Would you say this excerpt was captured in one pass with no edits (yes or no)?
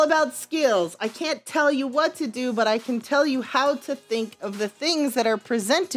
yes